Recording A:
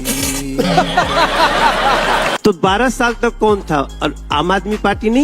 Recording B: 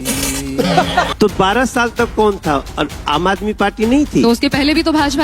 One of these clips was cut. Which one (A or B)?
B